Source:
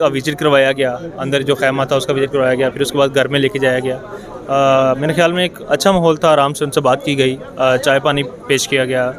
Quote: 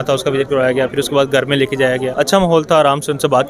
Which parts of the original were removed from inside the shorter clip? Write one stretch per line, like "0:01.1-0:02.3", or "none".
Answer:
0:03.9-0:05.6